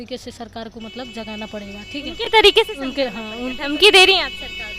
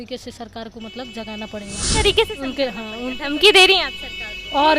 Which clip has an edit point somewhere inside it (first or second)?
second